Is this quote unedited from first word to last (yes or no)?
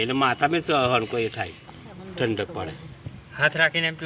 yes